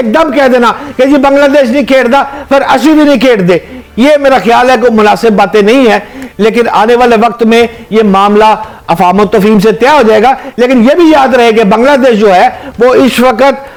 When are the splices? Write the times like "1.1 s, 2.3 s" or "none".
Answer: none